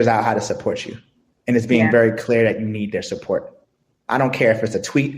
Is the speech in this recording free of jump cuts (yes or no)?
yes